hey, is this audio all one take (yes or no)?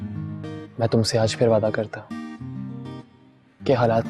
yes